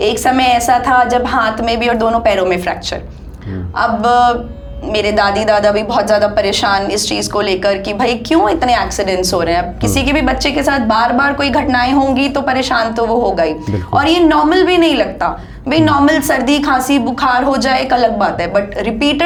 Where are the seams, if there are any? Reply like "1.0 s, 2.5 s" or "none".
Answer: none